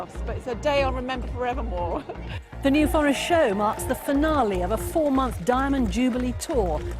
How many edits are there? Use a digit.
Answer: 1